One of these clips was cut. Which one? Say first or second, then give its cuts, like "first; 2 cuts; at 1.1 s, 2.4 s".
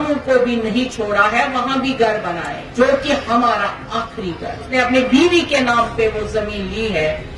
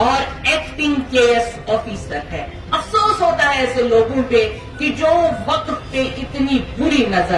first; 2 cuts; at 2.6 s, 4.7 s